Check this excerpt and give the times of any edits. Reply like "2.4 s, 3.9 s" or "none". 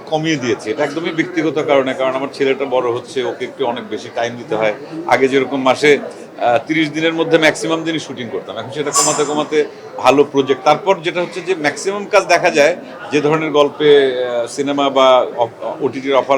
none